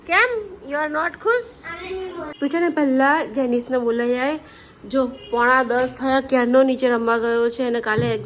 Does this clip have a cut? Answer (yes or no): yes